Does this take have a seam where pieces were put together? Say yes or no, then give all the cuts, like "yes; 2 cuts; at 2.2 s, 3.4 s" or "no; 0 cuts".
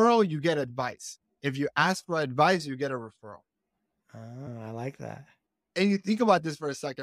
no; 0 cuts